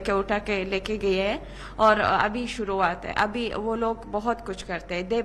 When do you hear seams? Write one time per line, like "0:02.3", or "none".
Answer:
none